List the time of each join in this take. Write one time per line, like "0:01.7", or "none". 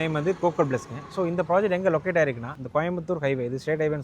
0:02.5